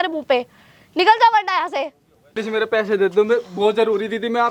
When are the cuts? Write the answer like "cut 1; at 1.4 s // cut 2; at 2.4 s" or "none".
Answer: cut 1; at 2.4 s